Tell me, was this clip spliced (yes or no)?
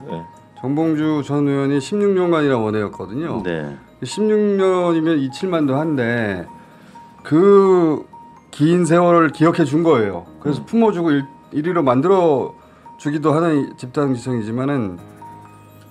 no